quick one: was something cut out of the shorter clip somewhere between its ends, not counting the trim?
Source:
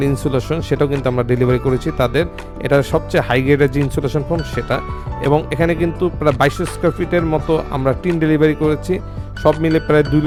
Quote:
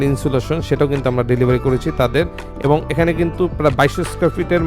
yes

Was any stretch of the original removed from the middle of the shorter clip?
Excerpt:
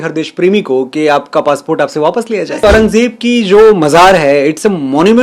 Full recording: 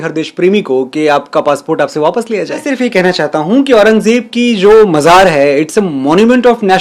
yes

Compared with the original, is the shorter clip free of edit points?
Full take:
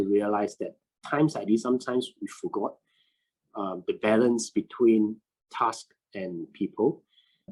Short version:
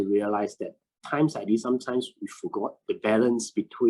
no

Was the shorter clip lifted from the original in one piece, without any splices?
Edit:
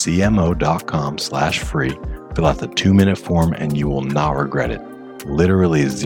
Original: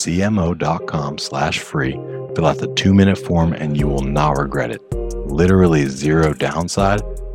yes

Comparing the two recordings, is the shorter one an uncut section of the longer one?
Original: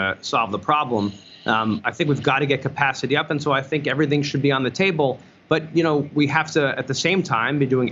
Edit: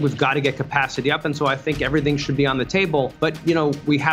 no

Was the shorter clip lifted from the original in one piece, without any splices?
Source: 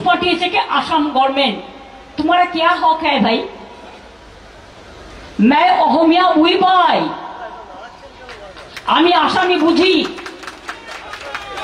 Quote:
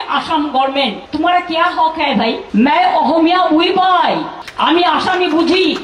no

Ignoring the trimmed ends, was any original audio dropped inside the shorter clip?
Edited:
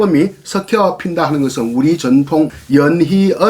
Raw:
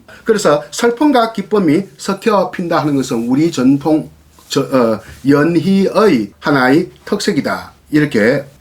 yes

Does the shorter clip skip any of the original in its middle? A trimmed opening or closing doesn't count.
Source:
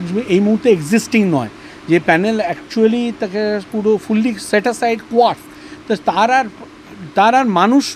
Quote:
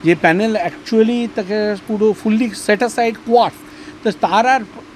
no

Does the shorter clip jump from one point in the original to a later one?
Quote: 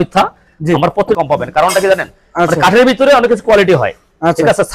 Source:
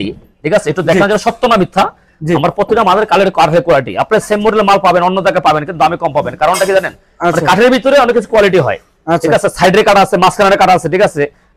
yes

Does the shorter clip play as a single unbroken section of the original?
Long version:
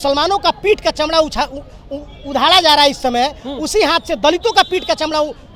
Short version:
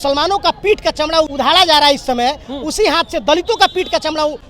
no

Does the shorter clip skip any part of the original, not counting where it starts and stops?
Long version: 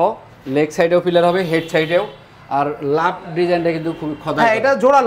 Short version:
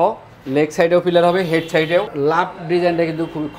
yes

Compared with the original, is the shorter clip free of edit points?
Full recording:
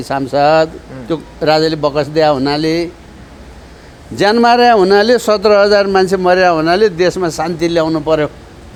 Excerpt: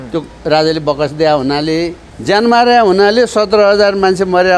no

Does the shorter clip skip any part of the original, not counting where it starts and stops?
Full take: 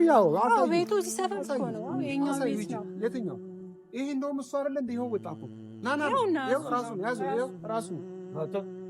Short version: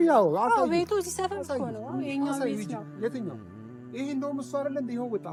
no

